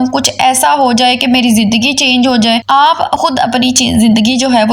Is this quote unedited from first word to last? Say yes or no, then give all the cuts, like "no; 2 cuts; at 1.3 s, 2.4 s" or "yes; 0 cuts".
yes; 0 cuts